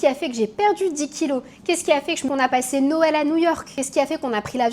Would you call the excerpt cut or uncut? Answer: cut